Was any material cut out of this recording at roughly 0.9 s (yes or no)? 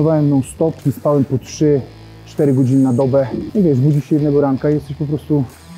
yes